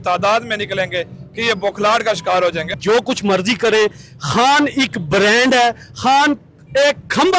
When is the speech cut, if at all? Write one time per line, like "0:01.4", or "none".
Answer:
0:02.8